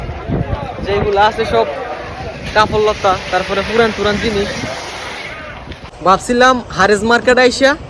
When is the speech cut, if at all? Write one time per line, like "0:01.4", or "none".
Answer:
0:06.0